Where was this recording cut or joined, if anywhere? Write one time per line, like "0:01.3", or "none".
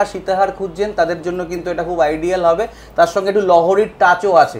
none